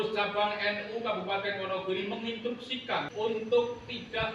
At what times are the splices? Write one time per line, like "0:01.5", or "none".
0:03.4